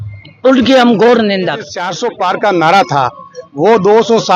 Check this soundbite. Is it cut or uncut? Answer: cut